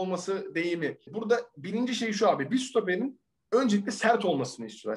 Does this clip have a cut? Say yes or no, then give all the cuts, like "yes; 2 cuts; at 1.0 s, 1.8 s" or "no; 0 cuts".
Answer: yes; 1 cut; at 1.1 s